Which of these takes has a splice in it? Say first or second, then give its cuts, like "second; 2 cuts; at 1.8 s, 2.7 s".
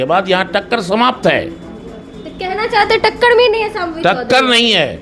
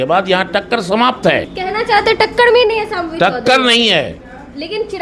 second; 1 cut; at 1.5 s